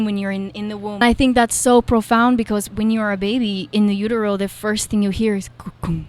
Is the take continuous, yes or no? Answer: no